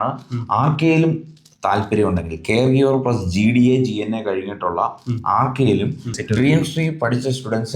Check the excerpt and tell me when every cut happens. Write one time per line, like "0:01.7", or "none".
0:06.2